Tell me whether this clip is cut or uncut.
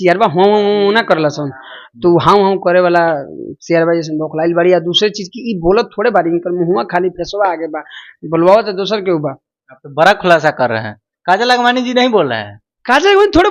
uncut